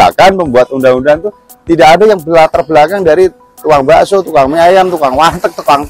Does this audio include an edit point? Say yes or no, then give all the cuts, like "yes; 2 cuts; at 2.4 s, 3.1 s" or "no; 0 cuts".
no; 0 cuts